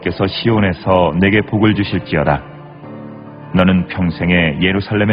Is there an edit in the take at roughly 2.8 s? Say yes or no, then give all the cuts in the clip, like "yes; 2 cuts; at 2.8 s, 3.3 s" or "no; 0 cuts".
no; 0 cuts